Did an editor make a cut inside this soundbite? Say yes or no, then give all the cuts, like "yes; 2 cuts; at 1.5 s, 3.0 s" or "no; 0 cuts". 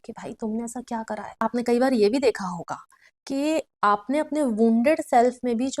yes; 1 cut; at 1.3 s